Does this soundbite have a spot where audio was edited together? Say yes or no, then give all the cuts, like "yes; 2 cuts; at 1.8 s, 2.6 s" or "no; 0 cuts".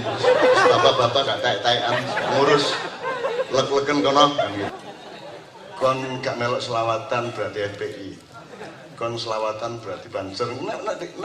yes; 1 cut; at 4.7 s